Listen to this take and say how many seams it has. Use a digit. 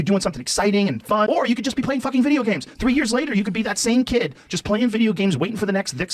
1